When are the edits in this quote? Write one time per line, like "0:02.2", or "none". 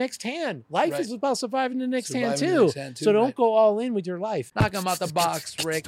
0:04.5